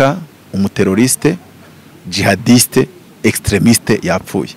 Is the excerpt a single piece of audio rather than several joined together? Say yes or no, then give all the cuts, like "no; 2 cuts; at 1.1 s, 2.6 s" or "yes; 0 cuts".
yes; 0 cuts